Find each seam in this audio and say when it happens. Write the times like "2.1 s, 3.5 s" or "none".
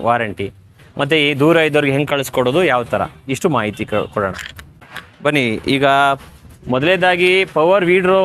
none